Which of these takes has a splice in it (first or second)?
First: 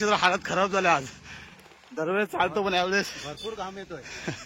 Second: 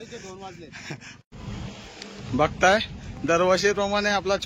second